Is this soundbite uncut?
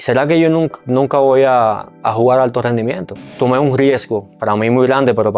no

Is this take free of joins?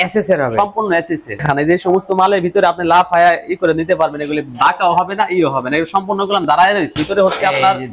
no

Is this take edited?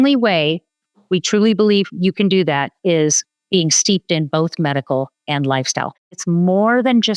yes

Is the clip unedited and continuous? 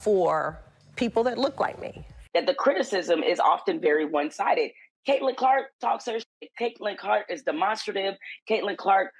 no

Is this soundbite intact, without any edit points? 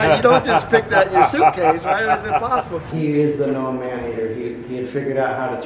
no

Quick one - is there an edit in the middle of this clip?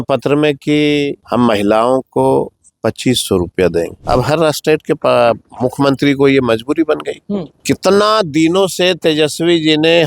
yes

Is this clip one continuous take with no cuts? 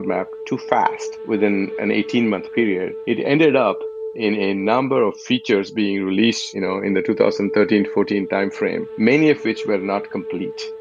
yes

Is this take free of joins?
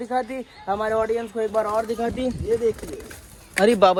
yes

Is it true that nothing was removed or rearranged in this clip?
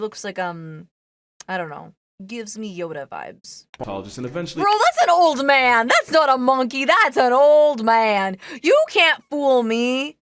no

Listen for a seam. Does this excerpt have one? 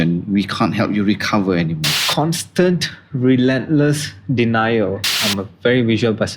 yes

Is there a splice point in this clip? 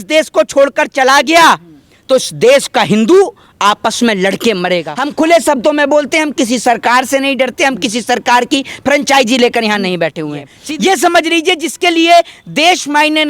yes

